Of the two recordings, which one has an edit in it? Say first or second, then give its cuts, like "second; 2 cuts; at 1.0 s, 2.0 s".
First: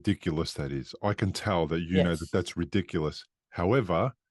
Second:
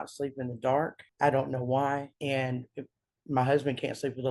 second; 2 cuts; at 1.0 s, 2.1 s